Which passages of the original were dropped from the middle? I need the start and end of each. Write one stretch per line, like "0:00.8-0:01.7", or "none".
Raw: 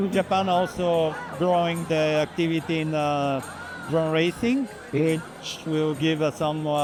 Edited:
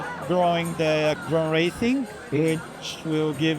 0:02.3-0:03.8